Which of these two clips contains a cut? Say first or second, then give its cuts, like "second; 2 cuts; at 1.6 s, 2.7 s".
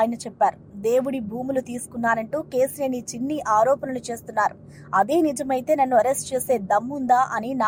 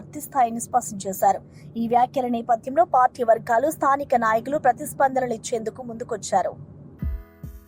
second; 1 cut; at 6.7 s